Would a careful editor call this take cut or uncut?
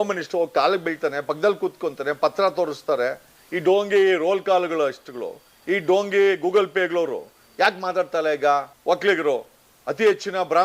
cut